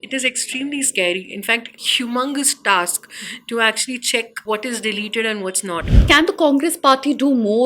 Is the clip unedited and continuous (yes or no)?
no